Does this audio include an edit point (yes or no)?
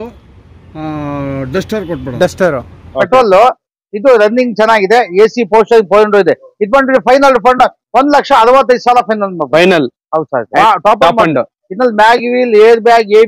yes